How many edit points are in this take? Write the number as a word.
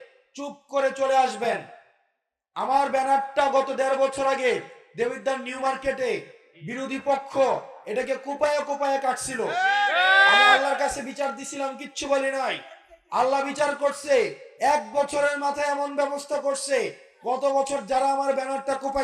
zero